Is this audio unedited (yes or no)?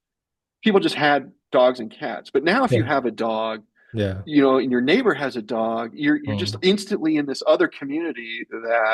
yes